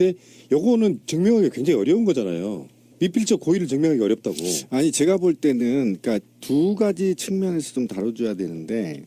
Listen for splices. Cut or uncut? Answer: uncut